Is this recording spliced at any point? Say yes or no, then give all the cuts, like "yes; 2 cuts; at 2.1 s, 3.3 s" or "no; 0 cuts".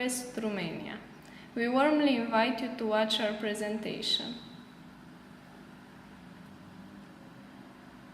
yes; 1 cut; at 0.9 s